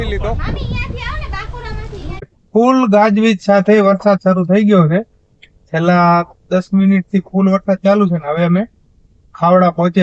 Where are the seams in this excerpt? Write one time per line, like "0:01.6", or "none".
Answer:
0:02.3

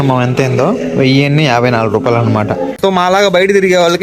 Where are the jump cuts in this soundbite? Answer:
0:02.7

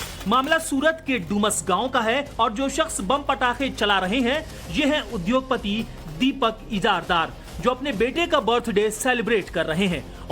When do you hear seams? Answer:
0:07.1

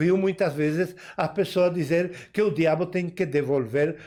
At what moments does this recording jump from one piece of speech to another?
none

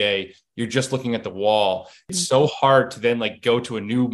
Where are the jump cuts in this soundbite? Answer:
0:02.0

